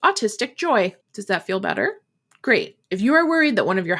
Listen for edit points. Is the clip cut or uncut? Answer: cut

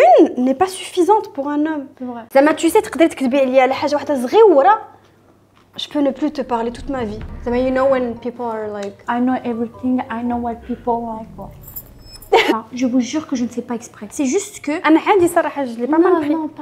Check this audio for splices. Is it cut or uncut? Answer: cut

